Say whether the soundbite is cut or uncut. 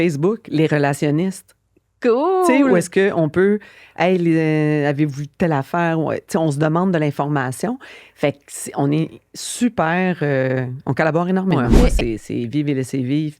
cut